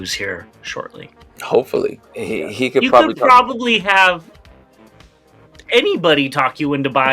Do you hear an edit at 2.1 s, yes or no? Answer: yes